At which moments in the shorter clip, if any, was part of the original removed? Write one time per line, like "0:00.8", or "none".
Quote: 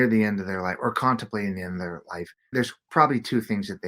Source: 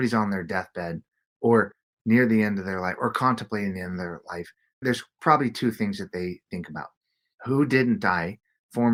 0:02.3